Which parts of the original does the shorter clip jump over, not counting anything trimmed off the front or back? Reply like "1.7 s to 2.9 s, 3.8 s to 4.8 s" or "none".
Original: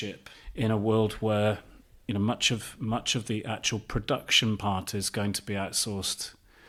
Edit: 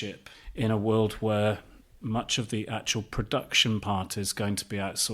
1.9 s to 2.7 s